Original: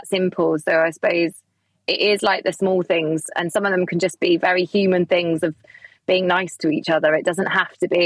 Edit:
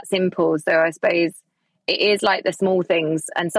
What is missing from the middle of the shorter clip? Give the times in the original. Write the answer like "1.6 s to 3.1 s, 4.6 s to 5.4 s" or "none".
none